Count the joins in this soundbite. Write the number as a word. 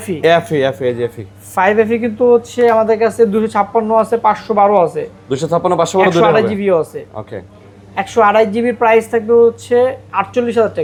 zero